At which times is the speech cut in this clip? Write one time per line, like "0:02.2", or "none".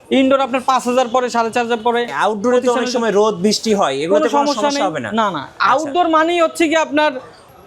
0:02.1